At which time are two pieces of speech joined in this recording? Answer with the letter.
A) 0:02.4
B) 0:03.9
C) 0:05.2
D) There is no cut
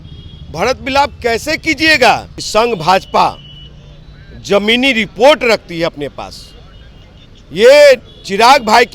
A